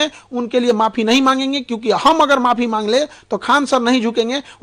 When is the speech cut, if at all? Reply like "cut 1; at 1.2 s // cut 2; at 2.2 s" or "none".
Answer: none